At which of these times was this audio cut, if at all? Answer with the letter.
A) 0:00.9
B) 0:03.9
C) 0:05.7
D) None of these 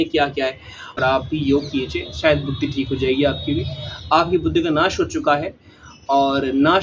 A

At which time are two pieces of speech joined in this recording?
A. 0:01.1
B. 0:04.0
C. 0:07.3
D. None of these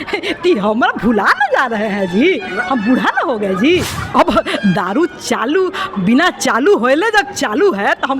B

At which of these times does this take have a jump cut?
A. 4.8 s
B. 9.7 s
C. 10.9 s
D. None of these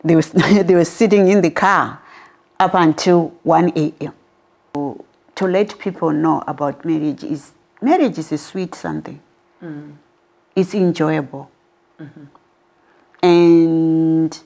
A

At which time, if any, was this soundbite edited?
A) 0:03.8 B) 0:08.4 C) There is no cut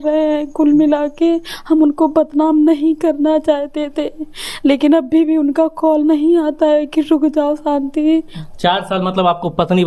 B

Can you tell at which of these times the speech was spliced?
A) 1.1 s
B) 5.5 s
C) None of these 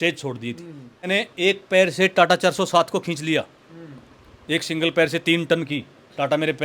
A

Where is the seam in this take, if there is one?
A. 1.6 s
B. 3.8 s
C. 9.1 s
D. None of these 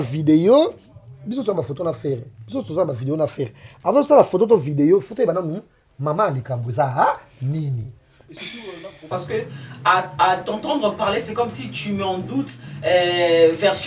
C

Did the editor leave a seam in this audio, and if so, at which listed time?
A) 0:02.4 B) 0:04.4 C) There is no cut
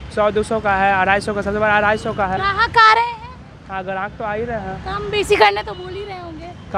A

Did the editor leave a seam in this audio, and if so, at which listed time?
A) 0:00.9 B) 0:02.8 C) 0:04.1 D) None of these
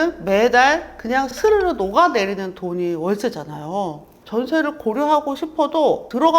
C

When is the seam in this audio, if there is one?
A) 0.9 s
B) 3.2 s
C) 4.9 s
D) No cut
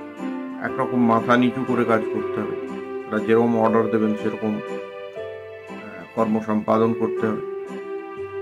D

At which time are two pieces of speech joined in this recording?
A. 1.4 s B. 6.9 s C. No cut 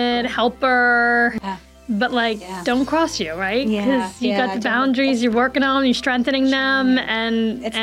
A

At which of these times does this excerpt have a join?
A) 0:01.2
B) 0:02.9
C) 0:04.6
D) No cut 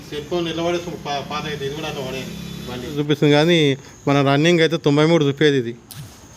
B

